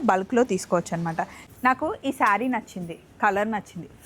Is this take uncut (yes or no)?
no